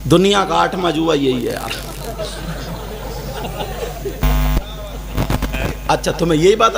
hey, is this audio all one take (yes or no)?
yes